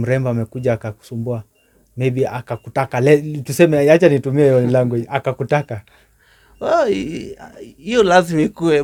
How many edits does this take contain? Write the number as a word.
zero